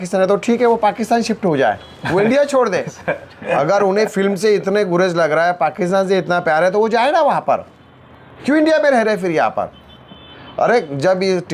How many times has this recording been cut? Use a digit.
0